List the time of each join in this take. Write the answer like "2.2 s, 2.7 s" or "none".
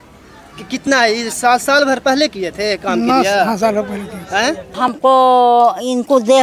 4.7 s